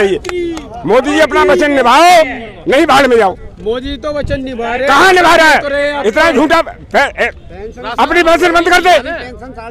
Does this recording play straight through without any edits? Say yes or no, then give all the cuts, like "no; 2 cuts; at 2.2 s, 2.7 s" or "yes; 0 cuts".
yes; 0 cuts